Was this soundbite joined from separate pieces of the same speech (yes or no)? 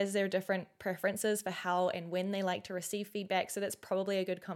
no